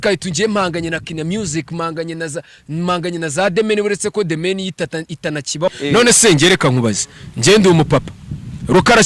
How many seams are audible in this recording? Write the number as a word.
one